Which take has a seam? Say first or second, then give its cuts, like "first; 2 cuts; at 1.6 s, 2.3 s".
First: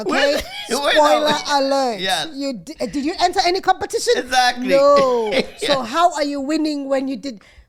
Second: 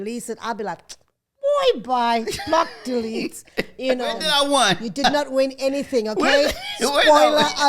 second; 1 cut; at 4.2 s